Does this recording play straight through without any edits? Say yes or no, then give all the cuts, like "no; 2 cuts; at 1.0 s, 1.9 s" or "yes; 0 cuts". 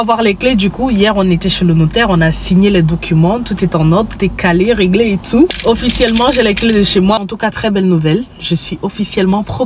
no; 2 cuts; at 5.6 s, 7.2 s